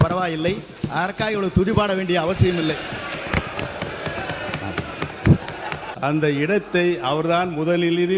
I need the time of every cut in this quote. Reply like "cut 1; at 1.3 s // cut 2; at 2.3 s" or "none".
cut 1; at 5.9 s